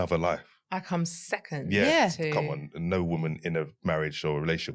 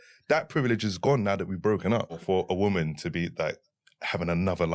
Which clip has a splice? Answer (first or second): second